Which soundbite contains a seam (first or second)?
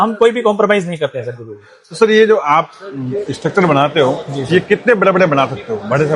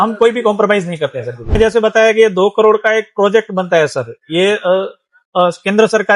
second